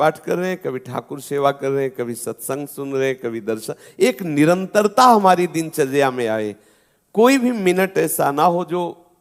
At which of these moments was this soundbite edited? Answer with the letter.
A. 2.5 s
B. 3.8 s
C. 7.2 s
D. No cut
D